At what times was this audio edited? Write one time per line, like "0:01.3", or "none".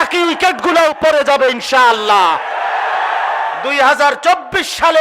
none